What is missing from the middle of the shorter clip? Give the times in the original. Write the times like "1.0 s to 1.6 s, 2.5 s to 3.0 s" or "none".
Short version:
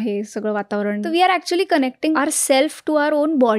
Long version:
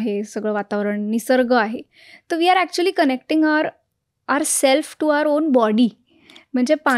1.0 s to 2.3 s, 3.4 s to 4.3 s